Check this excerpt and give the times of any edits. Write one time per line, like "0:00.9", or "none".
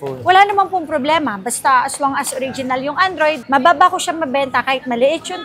0:03.4